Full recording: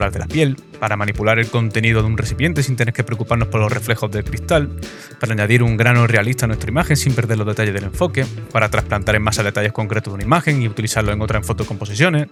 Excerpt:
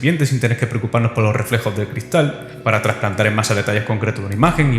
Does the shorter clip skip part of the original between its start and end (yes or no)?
yes